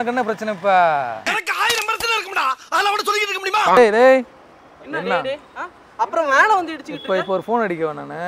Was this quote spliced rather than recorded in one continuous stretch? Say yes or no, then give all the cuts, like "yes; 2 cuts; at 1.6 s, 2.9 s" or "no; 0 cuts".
yes; 1 cut; at 3.8 s